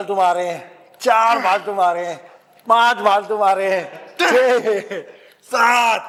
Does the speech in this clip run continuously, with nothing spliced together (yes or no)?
yes